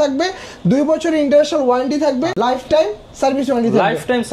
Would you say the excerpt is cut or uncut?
cut